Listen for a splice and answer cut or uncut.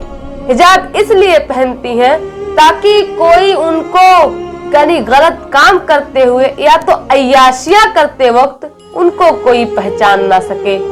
uncut